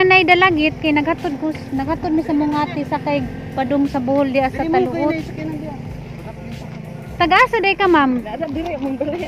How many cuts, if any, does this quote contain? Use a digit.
0